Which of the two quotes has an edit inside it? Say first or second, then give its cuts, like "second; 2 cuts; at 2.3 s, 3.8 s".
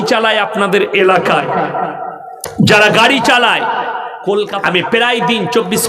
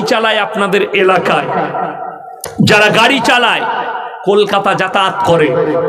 first; 1 cut; at 4.5 s